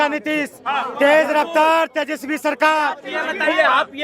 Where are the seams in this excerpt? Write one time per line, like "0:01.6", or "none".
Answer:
0:03.1